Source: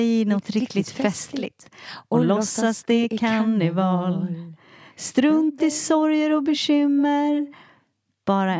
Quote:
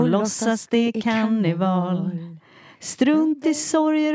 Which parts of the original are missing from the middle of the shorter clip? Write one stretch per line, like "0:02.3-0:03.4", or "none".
none

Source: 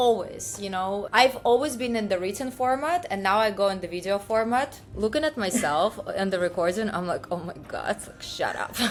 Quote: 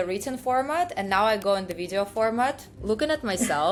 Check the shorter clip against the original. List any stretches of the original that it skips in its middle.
none

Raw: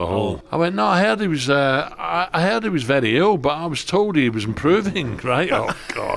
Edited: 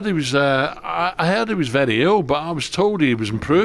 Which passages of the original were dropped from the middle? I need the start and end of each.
none

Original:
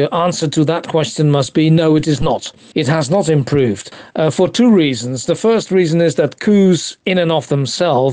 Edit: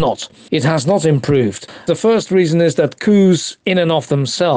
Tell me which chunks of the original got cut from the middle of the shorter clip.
0:03.9-0:05.1

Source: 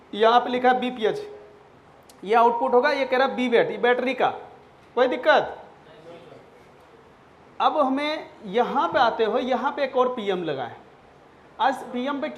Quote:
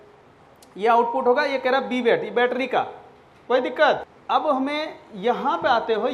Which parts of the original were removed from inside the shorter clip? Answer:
0:05.6-0:07.4

